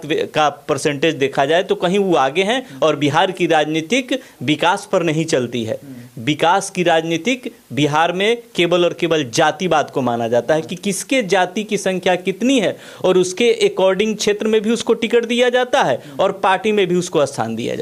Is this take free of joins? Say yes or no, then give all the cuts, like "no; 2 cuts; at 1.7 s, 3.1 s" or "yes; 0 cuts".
yes; 0 cuts